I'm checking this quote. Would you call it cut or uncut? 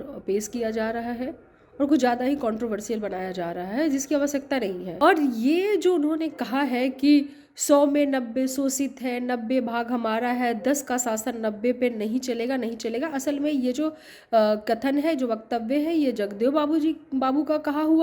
cut